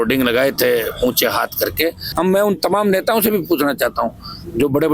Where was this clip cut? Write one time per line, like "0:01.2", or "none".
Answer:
0:02.0